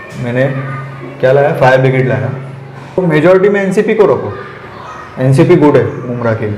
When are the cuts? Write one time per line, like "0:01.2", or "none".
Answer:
0:03.0